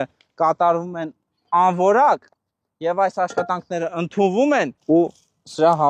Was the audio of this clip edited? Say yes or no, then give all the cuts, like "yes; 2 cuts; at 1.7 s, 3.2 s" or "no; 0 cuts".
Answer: yes; 1 cut; at 4.8 s